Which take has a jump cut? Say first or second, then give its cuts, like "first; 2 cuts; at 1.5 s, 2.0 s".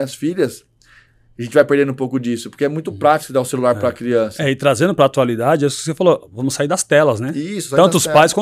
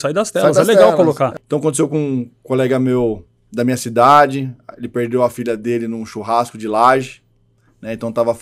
second; 1 cut; at 1.4 s